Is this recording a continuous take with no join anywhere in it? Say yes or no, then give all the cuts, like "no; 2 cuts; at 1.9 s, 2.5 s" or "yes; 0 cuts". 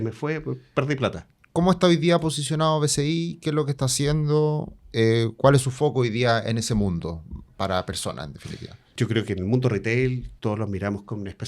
no; 3 cuts; at 1.3 s, 8.9 s, 10.3 s